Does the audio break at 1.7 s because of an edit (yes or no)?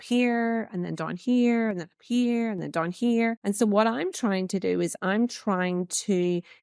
no